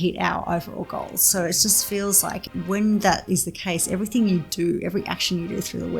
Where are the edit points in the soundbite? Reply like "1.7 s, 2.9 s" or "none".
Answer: 2.4 s